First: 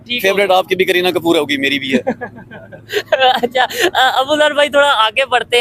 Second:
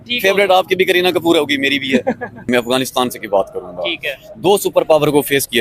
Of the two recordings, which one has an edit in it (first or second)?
second